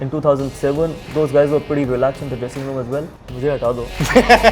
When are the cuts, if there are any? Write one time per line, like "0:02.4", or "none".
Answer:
0:01.1
0:03.1